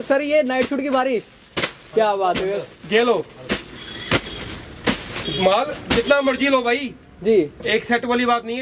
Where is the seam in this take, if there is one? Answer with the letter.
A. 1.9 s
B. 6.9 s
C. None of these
C